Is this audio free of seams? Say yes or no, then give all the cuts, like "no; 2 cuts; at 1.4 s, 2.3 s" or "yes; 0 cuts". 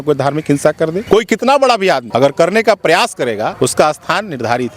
no; 3 cuts; at 1.0 s, 2.1 s, 3.5 s